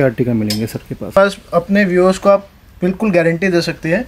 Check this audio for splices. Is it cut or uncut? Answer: cut